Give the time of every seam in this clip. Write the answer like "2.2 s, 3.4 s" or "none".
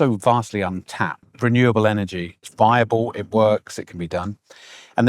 1.3 s, 2.4 s